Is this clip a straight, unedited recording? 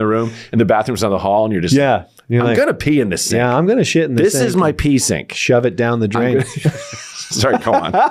yes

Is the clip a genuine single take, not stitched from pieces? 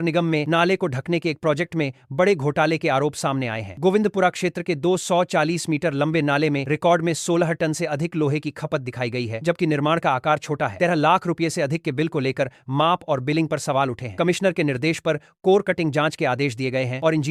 yes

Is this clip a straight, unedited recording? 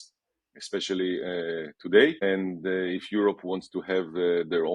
no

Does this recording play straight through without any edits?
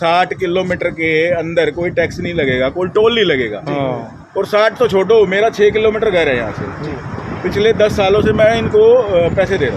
yes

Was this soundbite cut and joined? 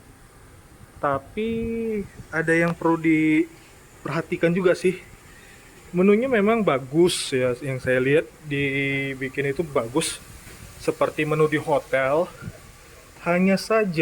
no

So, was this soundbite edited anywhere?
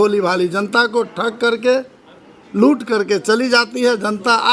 no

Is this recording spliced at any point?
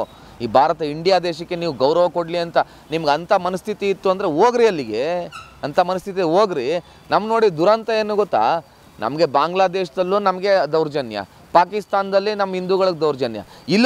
no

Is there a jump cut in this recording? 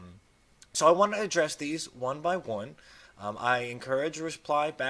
no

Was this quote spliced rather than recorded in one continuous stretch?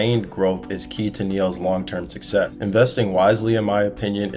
yes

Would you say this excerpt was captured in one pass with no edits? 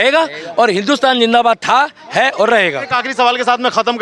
yes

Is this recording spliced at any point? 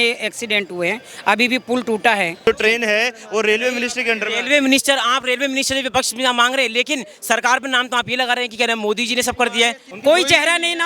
yes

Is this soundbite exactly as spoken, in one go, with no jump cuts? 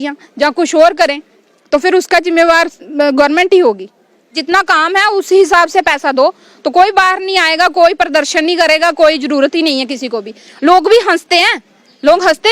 no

